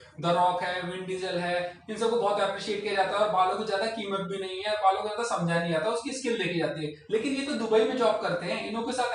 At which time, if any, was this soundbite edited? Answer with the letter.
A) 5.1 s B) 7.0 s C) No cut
C